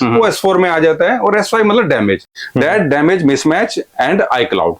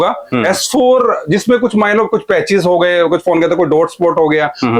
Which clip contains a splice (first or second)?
first